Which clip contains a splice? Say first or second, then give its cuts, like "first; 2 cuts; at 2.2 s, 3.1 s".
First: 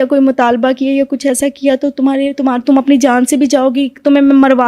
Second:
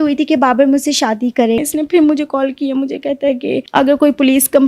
second; 2 cuts; at 1.6 s, 3.6 s